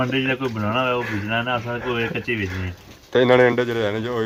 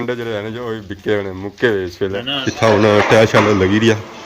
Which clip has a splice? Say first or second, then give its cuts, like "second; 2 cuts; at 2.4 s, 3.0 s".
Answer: second; 1 cut; at 2.4 s